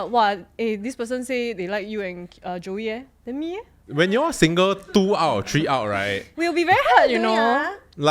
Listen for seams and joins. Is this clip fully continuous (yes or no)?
no